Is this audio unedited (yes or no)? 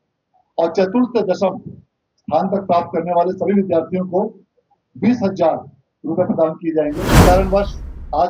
no